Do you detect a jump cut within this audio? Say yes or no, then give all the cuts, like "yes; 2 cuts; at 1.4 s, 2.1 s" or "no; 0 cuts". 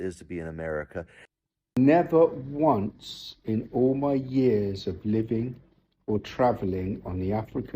yes; 1 cut; at 1.2 s